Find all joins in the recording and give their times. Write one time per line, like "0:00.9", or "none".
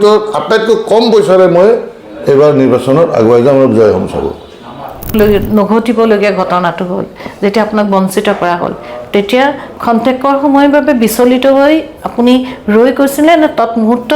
0:05.1